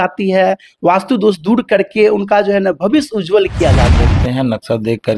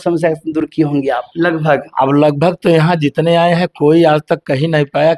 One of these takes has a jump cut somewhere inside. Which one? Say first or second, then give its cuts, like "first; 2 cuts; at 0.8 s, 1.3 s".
first; 1 cut; at 4.1 s